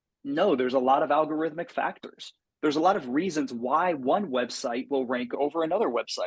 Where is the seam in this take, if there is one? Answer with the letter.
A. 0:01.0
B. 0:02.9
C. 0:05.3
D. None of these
C